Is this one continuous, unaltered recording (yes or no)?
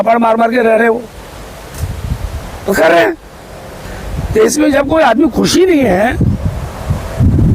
yes